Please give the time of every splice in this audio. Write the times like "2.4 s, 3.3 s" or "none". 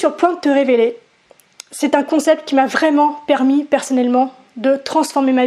none